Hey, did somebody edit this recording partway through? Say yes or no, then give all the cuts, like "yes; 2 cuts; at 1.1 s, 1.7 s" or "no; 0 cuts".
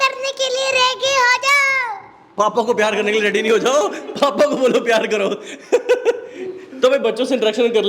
no; 0 cuts